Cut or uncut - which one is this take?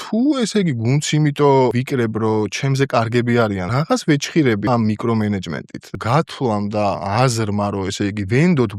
cut